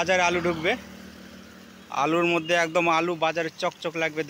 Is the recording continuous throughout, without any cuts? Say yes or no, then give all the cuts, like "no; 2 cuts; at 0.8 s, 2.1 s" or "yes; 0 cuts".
yes; 0 cuts